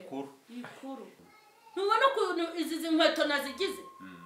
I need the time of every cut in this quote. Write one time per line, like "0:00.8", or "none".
0:01.2